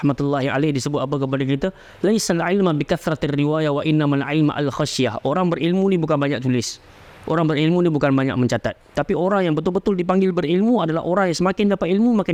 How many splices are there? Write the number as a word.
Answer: zero